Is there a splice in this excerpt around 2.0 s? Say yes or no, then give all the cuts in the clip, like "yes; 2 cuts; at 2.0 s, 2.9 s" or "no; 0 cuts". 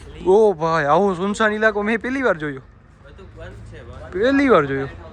no; 0 cuts